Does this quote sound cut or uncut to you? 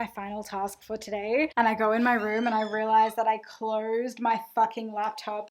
cut